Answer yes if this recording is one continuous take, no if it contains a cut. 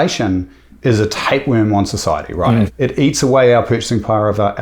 no